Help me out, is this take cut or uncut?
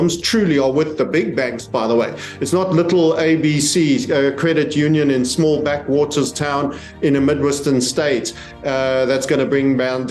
uncut